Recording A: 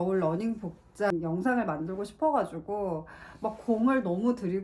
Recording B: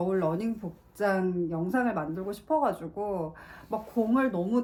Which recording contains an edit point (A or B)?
A